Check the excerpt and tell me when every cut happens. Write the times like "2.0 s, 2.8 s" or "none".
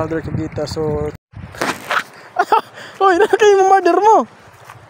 1.2 s